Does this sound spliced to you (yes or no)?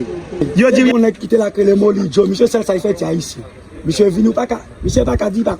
yes